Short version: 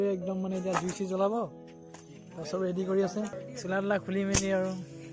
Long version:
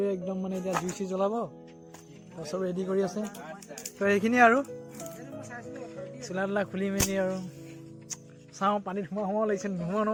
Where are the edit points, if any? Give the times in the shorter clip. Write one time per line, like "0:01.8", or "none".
0:03.4